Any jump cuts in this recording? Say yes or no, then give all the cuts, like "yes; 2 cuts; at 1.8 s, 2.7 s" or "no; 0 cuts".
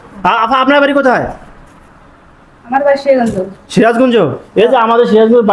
no; 0 cuts